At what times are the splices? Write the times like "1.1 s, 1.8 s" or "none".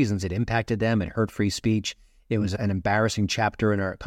none